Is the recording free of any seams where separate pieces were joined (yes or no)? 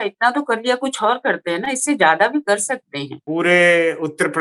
no